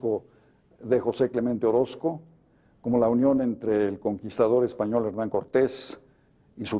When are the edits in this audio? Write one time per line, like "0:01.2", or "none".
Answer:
0:03.8